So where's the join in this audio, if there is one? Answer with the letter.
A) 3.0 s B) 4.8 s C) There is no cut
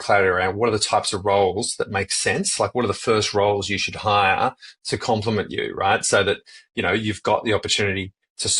C